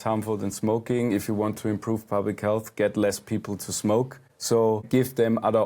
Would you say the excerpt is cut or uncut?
cut